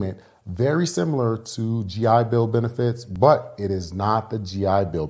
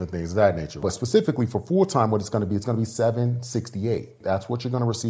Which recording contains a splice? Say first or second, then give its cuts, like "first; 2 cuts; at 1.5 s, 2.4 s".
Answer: second; 2 cuts; at 0.8 s, 4.2 s